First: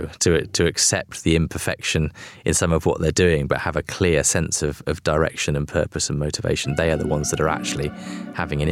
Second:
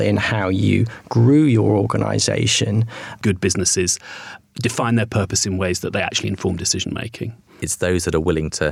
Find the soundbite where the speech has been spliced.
second; 2 cuts; at 3.2 s, 7.6 s

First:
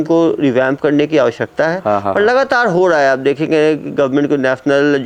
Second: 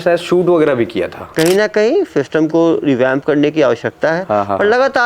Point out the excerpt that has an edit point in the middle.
second; 1 cut; at 1.3 s

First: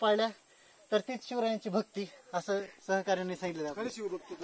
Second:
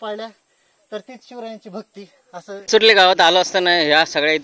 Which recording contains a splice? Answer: second; 1 cut; at 2.6 s

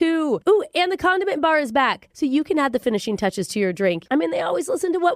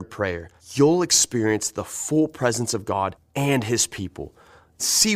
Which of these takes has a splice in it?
first; 1 cut; at 4.0 s

